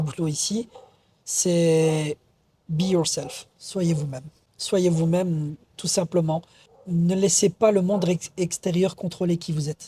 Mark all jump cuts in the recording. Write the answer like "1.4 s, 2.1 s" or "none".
none